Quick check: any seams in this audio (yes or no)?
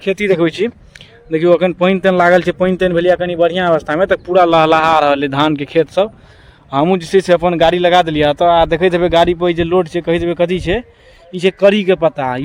no